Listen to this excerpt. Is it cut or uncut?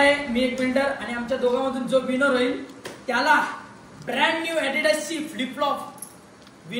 uncut